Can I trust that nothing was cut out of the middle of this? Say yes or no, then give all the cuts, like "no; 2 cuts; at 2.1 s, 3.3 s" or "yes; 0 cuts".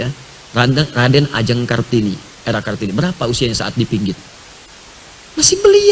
yes; 0 cuts